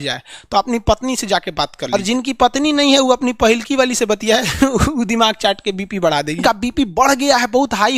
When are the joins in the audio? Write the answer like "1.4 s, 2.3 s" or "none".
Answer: 1.9 s, 6.4 s